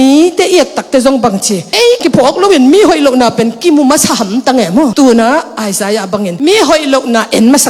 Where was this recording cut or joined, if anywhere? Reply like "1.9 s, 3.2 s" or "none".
2.0 s